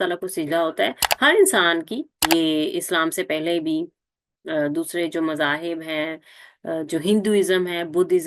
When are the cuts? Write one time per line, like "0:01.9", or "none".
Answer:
0:01.1
0:02.1